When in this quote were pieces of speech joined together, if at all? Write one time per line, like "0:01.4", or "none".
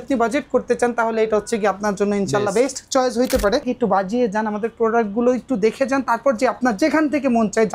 0:03.7